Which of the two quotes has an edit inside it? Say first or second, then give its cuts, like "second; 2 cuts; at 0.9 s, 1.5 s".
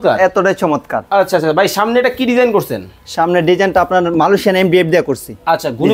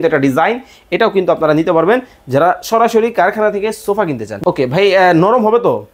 second; 1 cut; at 4.3 s